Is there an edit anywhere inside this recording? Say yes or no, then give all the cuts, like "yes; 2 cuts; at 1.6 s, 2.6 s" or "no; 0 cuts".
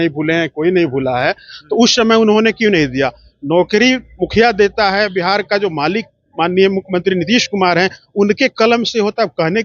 no; 0 cuts